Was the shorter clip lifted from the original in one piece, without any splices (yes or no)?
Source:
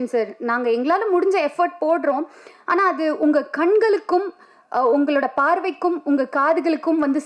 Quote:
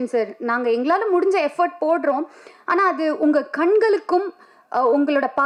yes